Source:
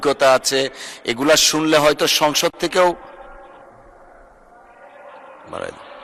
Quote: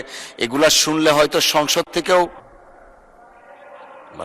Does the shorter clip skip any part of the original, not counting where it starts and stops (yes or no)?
yes